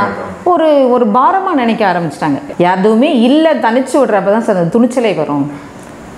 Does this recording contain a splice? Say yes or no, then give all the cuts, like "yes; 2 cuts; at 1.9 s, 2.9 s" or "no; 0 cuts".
yes; 1 cut; at 2.4 s